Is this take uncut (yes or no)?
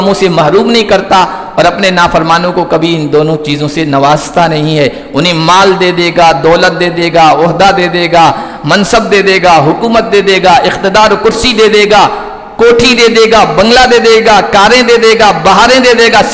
yes